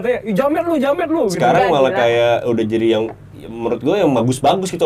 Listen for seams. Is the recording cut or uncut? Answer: uncut